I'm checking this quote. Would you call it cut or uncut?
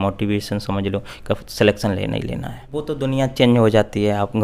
cut